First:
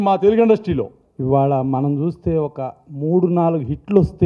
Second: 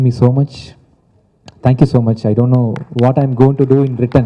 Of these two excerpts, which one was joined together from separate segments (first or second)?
first